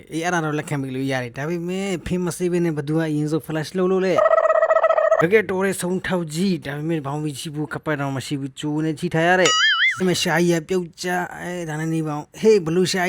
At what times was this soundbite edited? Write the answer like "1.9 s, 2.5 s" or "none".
5.2 s, 9.9 s